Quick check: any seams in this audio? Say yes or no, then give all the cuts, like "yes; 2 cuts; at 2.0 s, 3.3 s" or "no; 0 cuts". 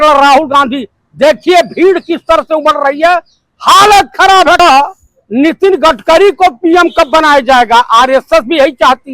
yes; 1 cut; at 4.6 s